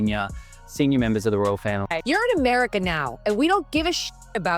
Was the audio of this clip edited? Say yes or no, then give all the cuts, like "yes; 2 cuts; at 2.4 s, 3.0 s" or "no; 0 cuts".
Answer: yes; 1 cut; at 2.0 s